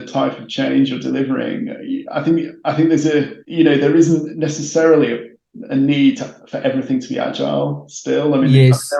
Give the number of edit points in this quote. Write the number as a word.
zero